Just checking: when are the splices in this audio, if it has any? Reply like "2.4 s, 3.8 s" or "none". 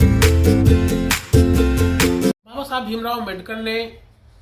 2.3 s